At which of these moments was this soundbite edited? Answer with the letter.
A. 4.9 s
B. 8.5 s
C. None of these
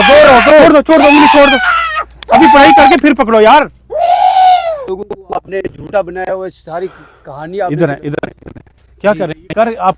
A